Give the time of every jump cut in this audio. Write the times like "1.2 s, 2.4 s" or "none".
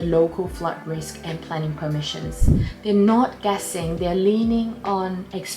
2.6 s